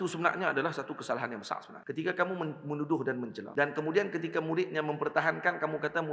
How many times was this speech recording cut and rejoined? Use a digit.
2